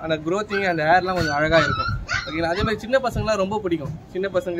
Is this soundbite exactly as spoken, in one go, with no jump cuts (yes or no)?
yes